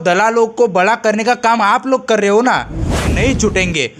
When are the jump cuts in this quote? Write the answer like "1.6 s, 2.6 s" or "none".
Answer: 3.1 s